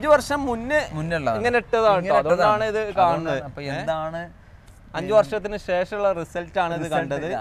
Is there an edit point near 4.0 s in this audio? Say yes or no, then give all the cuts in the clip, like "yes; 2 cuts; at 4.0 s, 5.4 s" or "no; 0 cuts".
no; 0 cuts